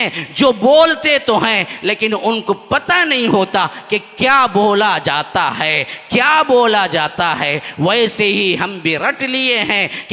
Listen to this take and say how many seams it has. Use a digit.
0